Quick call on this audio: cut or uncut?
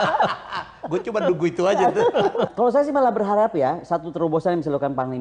cut